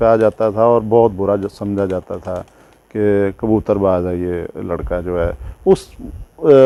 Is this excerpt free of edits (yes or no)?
yes